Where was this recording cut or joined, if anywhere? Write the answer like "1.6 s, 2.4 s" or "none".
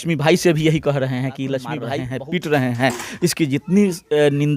1.8 s